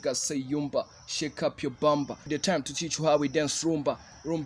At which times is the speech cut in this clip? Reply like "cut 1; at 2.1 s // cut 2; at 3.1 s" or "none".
cut 1; at 2.3 s